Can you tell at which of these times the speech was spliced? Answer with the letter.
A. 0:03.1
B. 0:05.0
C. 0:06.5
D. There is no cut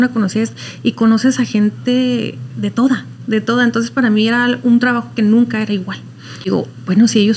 C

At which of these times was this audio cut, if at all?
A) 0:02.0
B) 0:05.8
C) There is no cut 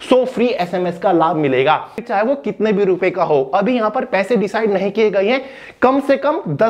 A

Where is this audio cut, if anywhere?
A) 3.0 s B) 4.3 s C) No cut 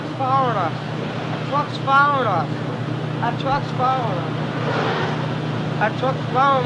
C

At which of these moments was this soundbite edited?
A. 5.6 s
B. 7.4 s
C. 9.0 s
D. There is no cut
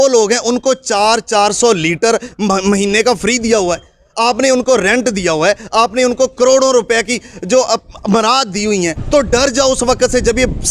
C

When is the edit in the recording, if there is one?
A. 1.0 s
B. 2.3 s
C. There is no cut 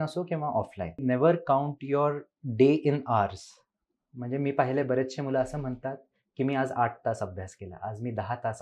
A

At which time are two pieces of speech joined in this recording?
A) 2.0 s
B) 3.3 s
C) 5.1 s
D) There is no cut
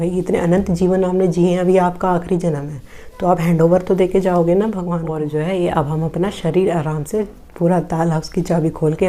C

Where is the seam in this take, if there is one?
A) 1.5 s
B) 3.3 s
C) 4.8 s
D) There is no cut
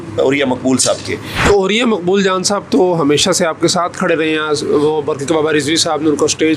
A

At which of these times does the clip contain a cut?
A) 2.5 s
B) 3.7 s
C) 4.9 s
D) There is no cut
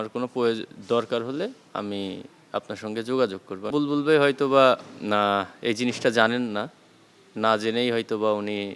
B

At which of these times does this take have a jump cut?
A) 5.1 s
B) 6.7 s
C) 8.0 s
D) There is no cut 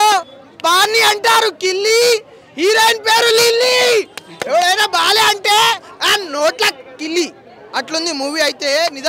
D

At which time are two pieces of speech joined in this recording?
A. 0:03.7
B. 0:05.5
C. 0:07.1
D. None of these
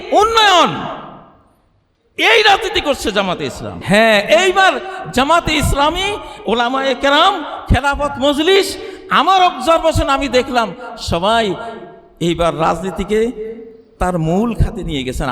A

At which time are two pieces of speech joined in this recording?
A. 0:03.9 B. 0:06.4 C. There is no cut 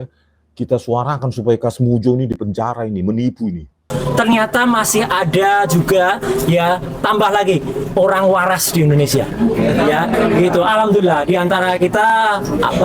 A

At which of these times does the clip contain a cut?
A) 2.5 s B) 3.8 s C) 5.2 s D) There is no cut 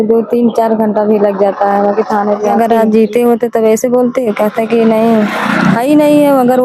A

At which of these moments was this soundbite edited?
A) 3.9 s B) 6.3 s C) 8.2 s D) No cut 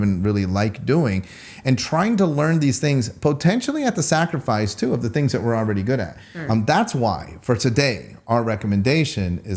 B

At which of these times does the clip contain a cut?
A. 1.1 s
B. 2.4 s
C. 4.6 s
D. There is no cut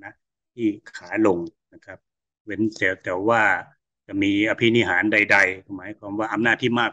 D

